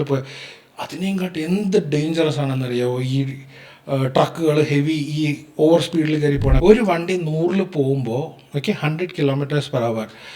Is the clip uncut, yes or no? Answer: no